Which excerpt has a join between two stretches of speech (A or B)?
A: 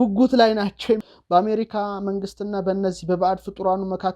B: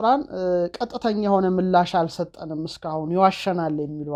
A